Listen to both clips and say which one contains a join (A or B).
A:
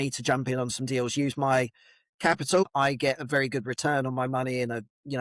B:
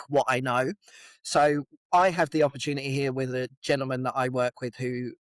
A